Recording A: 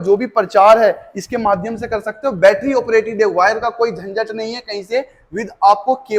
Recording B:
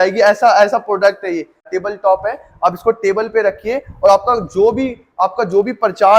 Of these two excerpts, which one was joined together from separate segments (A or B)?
B